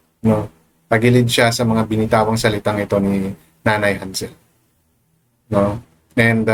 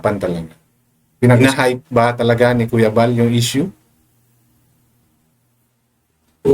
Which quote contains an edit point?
second; 1 cut; at 1.4 s

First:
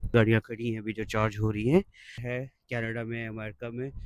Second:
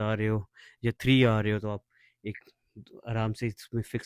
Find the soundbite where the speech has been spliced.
first; 1 cut; at 2.2 s

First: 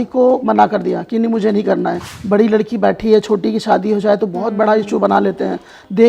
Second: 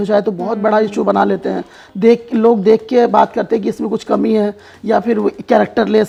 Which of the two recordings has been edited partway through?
first; 1 cut; at 2.1 s

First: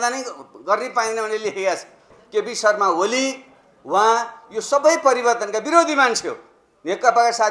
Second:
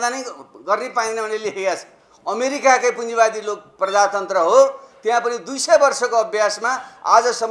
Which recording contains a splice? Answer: first; 1 cut; at 2.1 s

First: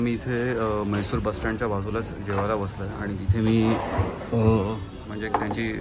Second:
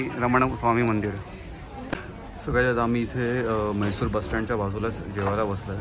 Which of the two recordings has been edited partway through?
second; 1 cut; at 1.9 s

